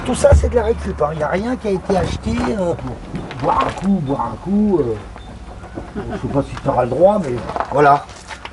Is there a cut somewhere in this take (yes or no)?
yes